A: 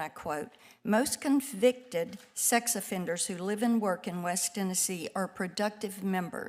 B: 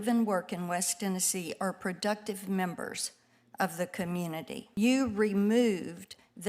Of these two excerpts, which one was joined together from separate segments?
B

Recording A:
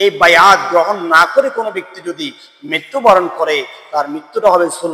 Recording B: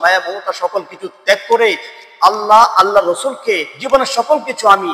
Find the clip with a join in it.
B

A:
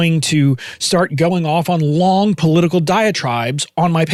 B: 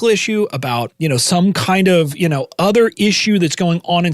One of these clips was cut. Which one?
B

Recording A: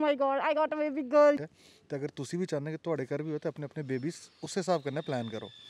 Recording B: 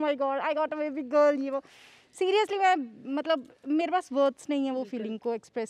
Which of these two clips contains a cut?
A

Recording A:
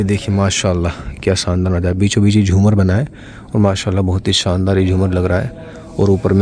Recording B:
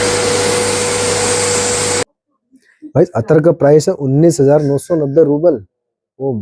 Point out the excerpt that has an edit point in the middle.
B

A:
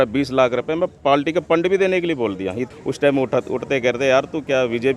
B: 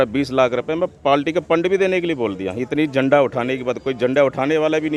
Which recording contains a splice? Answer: A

